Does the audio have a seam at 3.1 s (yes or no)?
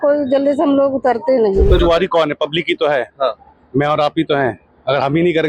no